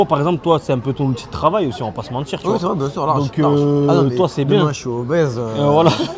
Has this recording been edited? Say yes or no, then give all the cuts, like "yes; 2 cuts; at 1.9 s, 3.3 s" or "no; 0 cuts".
no; 0 cuts